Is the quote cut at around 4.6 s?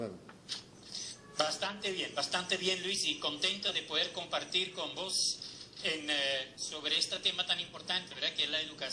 yes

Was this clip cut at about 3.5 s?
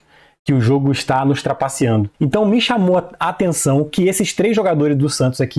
no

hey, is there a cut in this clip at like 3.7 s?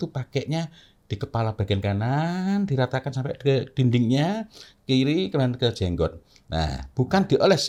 no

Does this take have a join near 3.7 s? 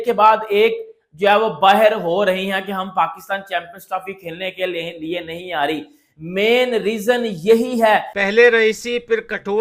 no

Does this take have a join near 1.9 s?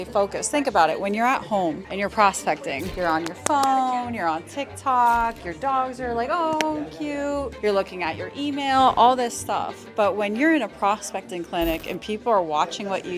yes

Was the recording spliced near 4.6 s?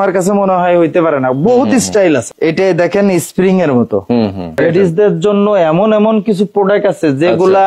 yes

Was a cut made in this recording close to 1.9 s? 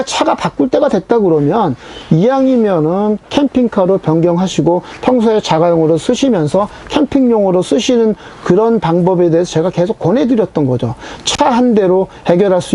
no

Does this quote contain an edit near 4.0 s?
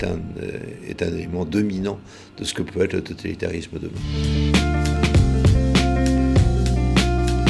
yes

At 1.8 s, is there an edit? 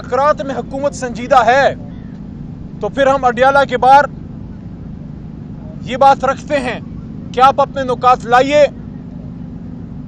no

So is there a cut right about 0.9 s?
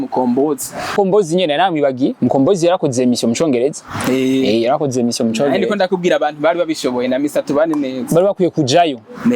yes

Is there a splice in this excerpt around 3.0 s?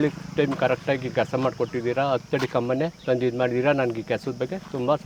yes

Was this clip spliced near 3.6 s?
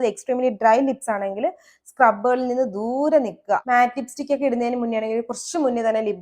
yes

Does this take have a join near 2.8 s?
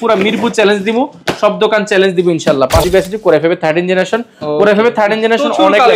yes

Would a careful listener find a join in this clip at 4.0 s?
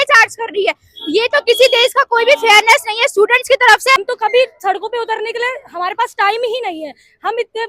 yes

